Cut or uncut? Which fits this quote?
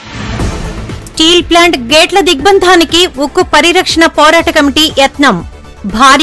cut